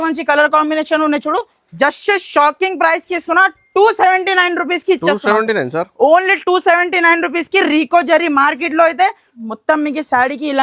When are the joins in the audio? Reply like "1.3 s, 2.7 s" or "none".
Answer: 9.3 s